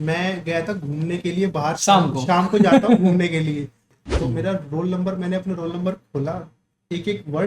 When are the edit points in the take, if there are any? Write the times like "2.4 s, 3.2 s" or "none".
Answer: 3.8 s